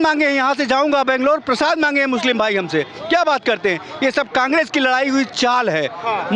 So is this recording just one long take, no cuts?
yes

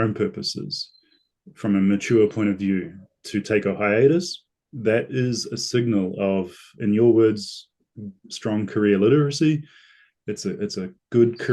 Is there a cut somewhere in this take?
no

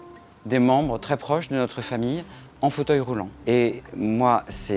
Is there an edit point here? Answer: yes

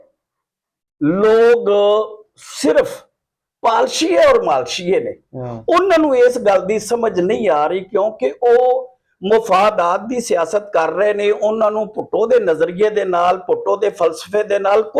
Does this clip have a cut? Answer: no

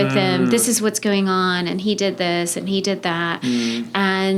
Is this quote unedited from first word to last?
yes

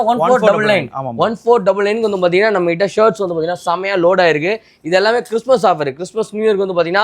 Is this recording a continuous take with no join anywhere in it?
yes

